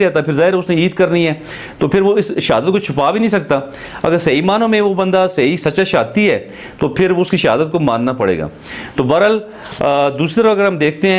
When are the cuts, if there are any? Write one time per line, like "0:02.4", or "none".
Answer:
none